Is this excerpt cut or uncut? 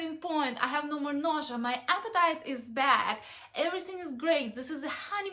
uncut